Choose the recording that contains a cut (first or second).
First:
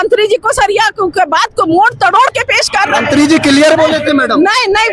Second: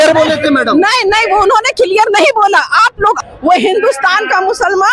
second